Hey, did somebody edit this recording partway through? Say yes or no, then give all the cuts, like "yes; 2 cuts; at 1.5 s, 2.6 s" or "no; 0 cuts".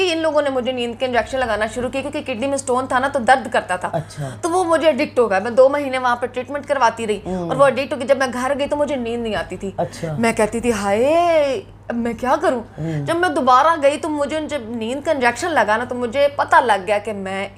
no; 0 cuts